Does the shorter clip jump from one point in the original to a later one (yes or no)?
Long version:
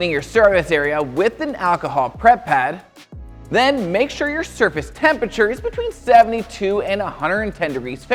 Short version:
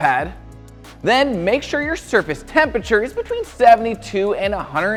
no